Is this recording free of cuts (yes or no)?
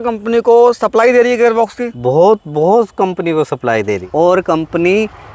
no